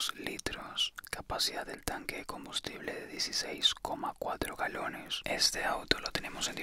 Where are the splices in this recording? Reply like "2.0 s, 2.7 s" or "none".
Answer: 1.0 s, 5.1 s